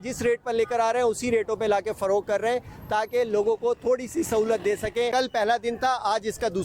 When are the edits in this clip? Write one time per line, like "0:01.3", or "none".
0:05.1